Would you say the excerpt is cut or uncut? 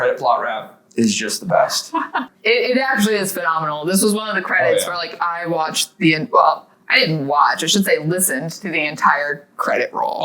cut